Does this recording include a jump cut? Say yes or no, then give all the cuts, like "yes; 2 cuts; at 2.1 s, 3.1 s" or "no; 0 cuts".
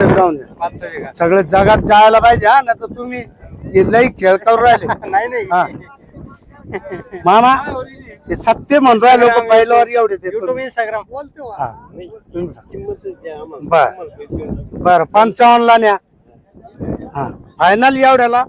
no; 0 cuts